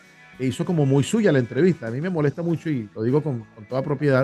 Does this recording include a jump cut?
no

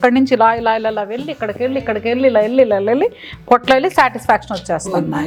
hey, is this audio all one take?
yes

